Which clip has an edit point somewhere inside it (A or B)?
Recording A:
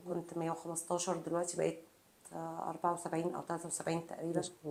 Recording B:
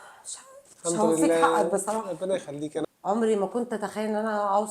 B